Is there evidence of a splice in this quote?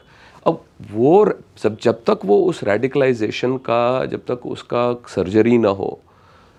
no; 0 cuts

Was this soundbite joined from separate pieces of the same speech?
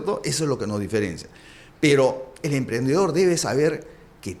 no; 0 cuts

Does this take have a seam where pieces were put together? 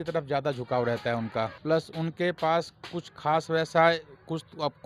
yes; 1 cut; at 1.5 s

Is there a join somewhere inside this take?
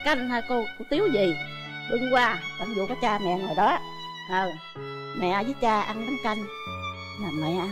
no; 0 cuts

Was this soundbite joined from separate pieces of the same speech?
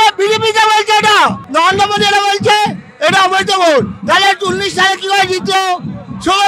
yes; 1 cut; at 1.4 s

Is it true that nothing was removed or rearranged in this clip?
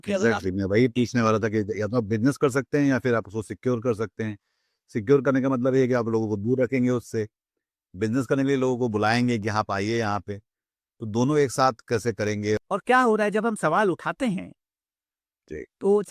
no; 1 cut; at 12.6 s

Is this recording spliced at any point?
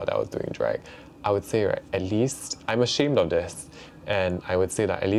no; 0 cuts

